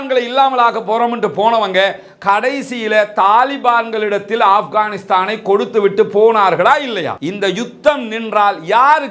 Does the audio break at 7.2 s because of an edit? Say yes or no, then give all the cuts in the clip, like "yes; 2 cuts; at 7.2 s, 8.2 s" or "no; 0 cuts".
yes; 1 cut; at 7.2 s